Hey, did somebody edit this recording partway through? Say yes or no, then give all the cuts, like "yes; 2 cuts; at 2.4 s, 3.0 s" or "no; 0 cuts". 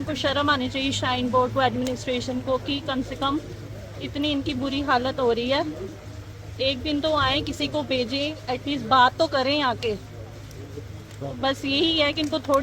no; 0 cuts